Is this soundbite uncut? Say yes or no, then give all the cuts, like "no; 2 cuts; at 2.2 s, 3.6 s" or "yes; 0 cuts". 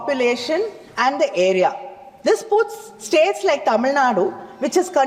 yes; 0 cuts